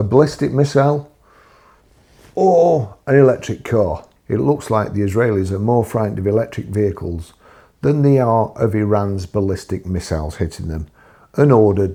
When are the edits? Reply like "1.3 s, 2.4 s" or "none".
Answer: none